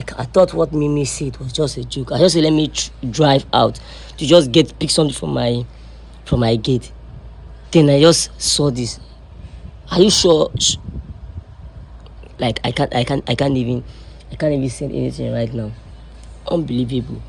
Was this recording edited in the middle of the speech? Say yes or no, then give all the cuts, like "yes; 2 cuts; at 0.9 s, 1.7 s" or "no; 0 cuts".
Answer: no; 0 cuts